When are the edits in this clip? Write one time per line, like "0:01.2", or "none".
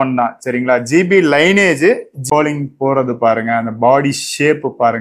0:02.2